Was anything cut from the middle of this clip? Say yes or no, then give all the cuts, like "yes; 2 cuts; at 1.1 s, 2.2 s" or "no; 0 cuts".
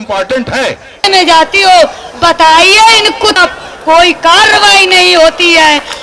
yes; 2 cuts; at 1.1 s, 3.4 s